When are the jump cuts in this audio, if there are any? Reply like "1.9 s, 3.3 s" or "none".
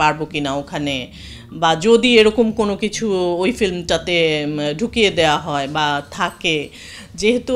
none

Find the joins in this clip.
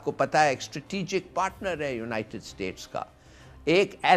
none

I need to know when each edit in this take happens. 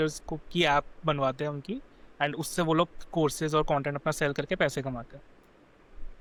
none

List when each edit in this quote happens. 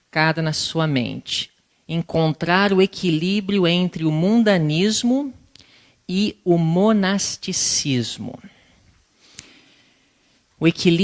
none

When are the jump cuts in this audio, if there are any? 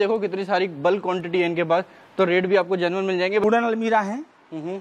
3.4 s

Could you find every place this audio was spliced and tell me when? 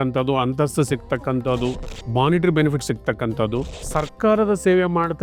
1.9 s, 3.8 s

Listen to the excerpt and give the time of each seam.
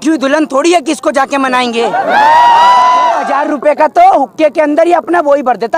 3.3 s

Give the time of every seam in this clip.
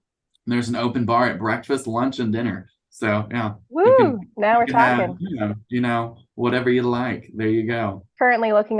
none

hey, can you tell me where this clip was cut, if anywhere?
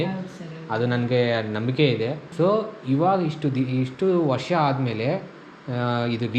2.2 s

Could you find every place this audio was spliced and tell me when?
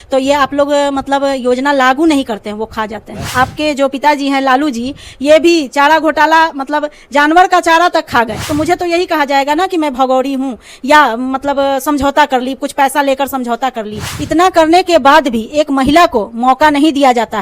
3.3 s, 8.4 s, 14.0 s

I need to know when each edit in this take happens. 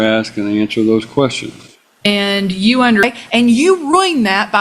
3.0 s

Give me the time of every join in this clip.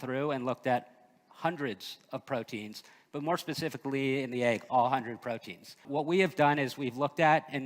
5.8 s

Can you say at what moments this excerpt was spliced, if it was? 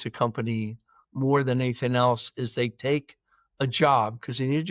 none

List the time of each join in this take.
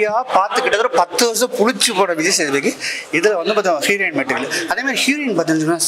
none

